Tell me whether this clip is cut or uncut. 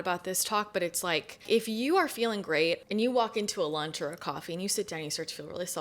cut